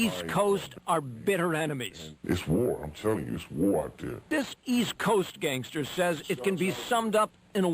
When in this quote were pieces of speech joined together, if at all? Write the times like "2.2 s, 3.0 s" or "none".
4.2 s